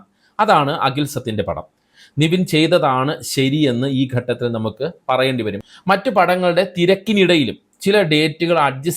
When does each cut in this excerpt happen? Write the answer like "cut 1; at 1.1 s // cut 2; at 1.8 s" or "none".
cut 1; at 5.6 s